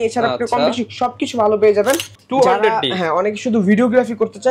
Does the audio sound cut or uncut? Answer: cut